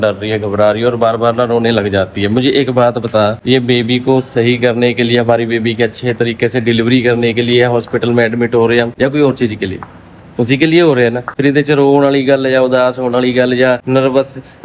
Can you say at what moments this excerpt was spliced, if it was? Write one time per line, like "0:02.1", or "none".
none